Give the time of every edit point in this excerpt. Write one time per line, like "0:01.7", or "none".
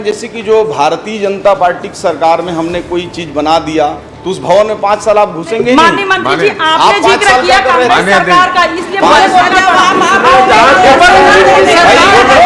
none